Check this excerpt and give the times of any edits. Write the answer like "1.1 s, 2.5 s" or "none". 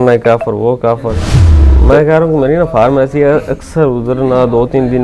1.4 s